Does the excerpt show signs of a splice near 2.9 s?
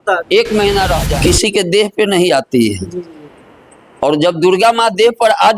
no; 1 cut; at 1.0 s

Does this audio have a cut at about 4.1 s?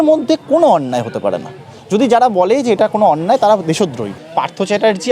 yes; 1 cut; at 4.1 s

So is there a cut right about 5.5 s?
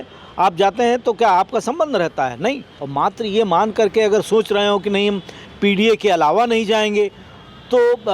no; 1 cut; at 2.8 s

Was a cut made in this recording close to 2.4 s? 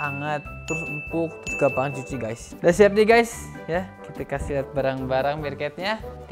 yes; 1 cut; at 2.4 s

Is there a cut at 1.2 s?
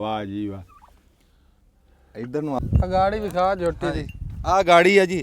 no; 1 cut; at 2.6 s

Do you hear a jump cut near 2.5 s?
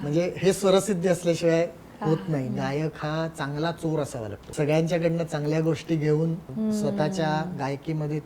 yes; 3 cuts; at 2.5 s, 4.4 s, 6.5 s

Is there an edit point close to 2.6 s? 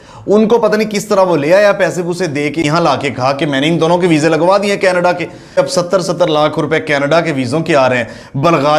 yes; 2 cuts; at 2.6 s, 5.6 s

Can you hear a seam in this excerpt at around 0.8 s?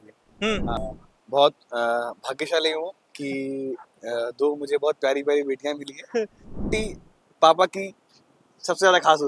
yes; 2 cuts; at 0.8 s, 6.7 s

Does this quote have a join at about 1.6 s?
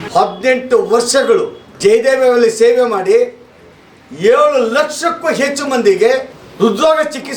yes; 2 cuts; at 1.6 s, 6.4 s

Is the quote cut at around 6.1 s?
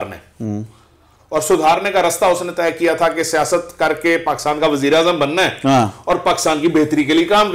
no; 0 cuts

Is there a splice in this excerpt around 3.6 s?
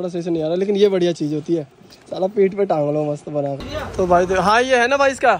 yes; 1 cut; at 3.6 s

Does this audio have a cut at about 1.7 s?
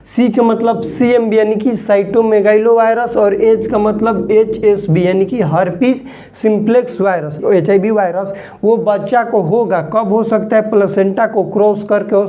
no; 1 cut; at 7.4 s

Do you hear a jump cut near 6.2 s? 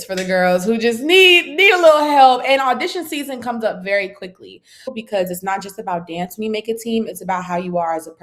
no; 1 cut; at 5.0 s

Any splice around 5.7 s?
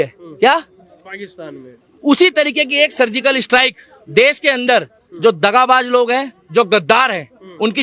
no; 0 cuts

